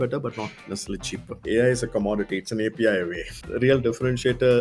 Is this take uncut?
no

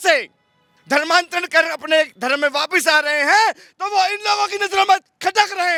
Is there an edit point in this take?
no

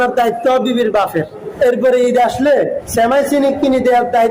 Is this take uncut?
no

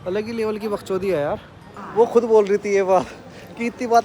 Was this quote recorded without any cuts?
no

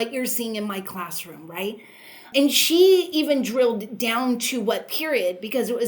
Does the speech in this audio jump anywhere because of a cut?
yes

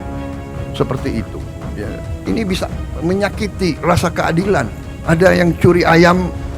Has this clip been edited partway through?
yes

